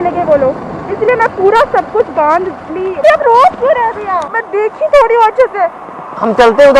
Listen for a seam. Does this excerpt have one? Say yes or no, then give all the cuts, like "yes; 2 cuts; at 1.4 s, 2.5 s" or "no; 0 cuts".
yes; 2 cuts; at 3.0 s, 4.3 s